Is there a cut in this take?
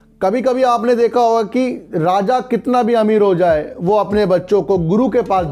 no; 0 cuts

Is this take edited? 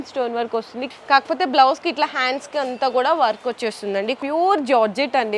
yes; 2 cuts; at 0.8 s, 4.2 s

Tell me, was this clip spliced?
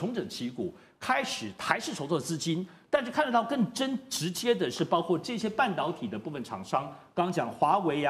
no; 0 cuts

